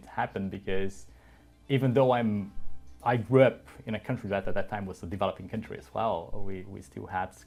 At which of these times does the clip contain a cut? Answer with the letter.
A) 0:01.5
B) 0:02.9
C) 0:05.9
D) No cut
D